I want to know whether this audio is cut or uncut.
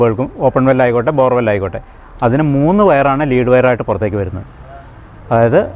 uncut